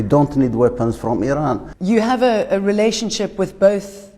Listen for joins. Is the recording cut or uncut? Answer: cut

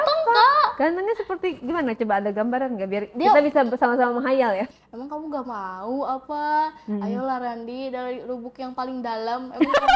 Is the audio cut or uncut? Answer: cut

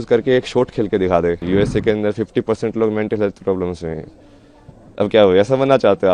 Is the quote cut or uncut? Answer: cut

